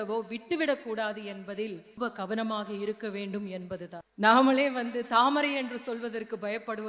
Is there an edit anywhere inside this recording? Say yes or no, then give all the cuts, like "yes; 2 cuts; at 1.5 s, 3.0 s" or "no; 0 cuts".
yes; 2 cuts; at 1.9 s, 4.0 s